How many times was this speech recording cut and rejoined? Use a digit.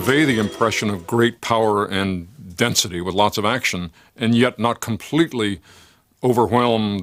0